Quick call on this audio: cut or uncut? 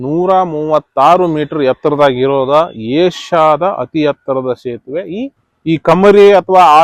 cut